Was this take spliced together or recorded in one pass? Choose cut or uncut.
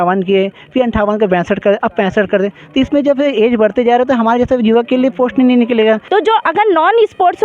cut